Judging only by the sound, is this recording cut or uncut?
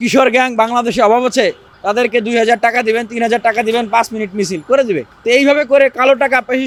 uncut